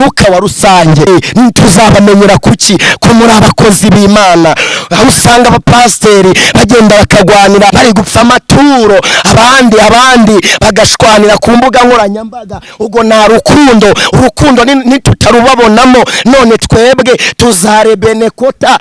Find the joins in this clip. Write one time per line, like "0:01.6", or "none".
0:01.1
0:07.7